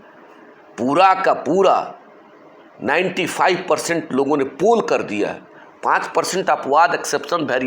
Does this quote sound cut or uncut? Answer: uncut